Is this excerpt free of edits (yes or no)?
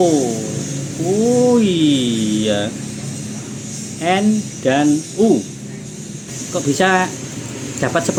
yes